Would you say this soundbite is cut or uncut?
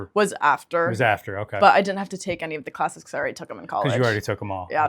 uncut